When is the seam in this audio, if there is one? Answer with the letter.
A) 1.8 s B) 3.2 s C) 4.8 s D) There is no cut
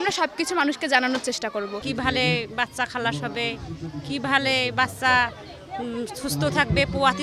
A